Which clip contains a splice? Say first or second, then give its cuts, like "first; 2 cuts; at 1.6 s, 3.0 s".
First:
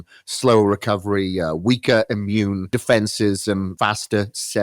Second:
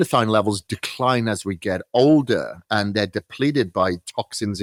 first; 2 cuts; at 2.7 s, 3.7 s